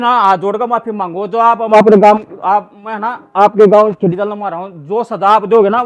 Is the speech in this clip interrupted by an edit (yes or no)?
no